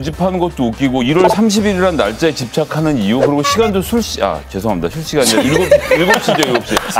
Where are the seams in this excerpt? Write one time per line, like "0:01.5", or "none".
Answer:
none